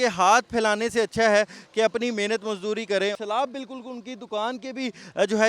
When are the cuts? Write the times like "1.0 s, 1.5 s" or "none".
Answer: 3.2 s